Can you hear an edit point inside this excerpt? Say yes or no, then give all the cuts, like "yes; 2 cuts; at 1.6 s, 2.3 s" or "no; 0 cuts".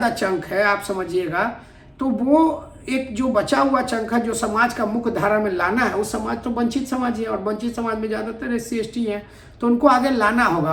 no; 0 cuts